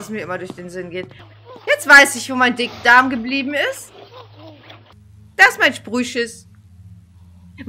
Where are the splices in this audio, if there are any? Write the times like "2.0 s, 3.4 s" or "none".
1.2 s, 4.9 s